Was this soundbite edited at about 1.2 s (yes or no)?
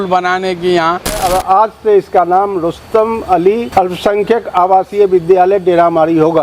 yes